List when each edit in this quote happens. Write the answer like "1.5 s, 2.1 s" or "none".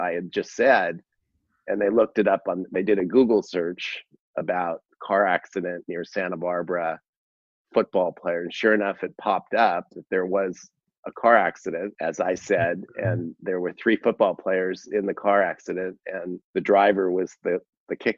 11.9 s, 16.4 s